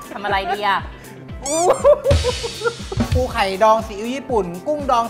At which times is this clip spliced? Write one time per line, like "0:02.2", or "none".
0:03.1